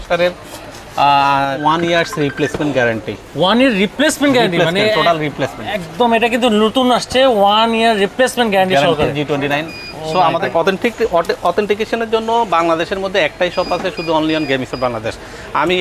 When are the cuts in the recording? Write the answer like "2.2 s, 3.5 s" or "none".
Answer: 1.6 s, 10.5 s